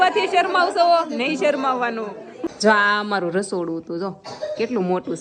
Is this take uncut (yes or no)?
no